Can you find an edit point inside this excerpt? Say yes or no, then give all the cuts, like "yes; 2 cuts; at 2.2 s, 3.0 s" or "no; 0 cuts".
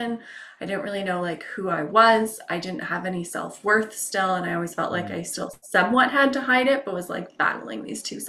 no; 0 cuts